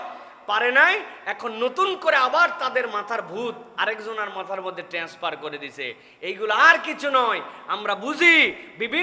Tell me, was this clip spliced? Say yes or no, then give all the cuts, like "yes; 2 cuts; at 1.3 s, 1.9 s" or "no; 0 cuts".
no; 0 cuts